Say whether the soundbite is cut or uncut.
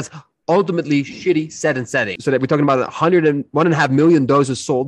cut